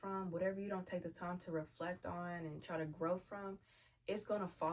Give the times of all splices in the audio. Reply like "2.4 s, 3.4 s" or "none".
none